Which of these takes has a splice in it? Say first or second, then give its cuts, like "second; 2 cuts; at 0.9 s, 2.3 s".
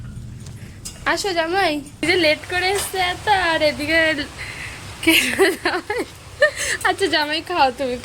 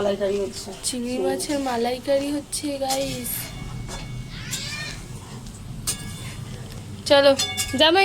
first; 1 cut; at 2.0 s